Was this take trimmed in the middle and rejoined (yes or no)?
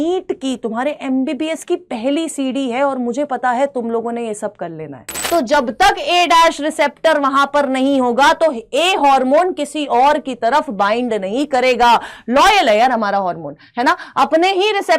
yes